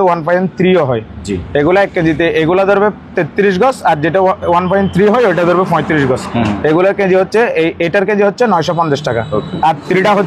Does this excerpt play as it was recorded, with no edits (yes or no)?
yes